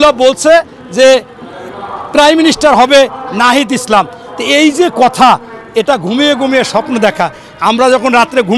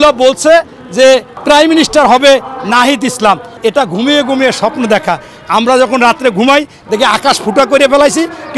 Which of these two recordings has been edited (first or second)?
second